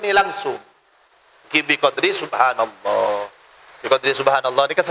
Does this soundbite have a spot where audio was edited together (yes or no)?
no